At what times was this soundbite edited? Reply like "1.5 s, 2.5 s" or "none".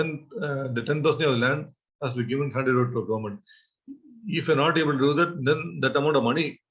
none